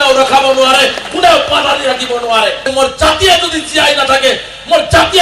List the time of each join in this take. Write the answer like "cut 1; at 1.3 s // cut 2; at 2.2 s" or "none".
cut 1; at 2.7 s